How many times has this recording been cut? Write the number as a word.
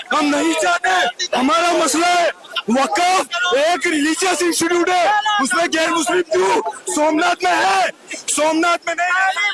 zero